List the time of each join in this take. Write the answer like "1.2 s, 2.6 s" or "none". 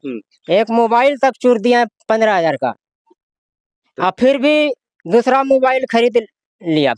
none